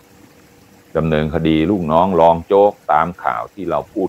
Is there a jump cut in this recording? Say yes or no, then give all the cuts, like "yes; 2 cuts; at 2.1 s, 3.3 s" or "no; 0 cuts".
yes; 1 cut; at 0.9 s